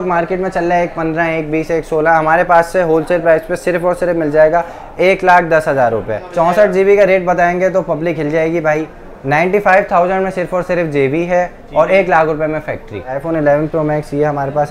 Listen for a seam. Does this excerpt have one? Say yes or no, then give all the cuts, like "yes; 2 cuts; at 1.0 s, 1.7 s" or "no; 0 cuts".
yes; 2 cuts; at 6.2 s, 13.2 s